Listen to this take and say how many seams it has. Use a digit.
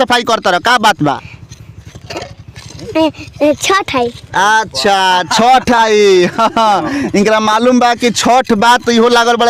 0